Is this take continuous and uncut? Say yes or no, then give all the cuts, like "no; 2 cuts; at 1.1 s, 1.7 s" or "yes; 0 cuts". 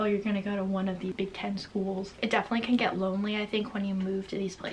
no; 2 cuts; at 1.1 s, 2.2 s